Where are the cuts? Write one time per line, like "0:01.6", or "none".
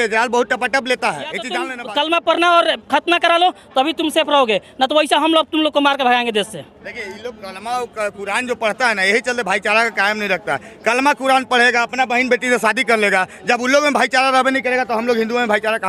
0:01.6